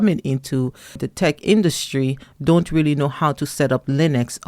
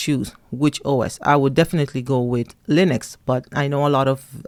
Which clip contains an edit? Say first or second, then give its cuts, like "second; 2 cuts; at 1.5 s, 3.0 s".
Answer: first; 1 cut; at 1.0 s